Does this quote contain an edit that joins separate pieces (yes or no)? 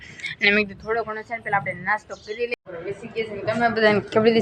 yes